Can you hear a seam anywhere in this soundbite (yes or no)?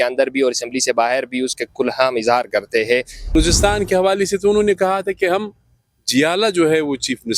yes